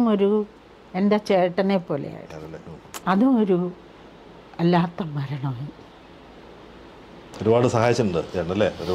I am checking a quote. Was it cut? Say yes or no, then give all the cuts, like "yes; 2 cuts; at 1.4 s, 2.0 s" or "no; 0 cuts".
no; 0 cuts